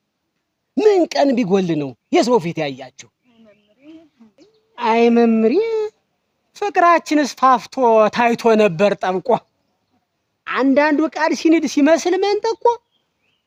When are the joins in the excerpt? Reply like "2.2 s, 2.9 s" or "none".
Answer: none

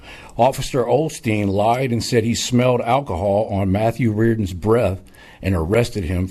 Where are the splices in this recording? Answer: none

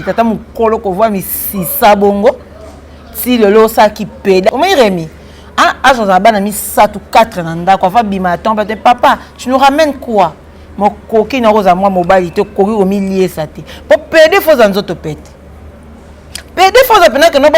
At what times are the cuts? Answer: 4.5 s

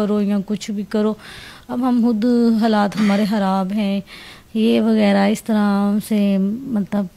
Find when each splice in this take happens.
none

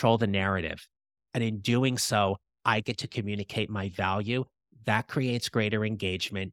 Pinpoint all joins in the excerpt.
none

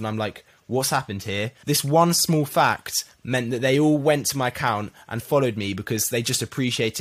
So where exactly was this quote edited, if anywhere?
1.5 s

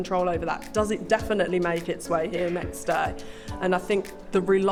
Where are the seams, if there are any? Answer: none

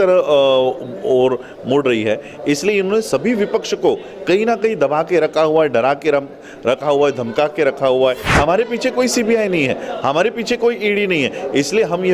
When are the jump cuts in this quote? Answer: 8.3 s

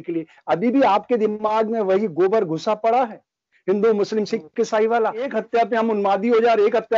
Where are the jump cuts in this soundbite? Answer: 5.3 s

